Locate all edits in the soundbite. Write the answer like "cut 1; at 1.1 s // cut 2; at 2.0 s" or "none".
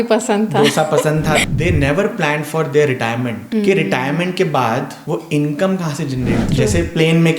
cut 1; at 1.5 s // cut 2; at 3.4 s // cut 3; at 4.9 s // cut 4; at 6.5 s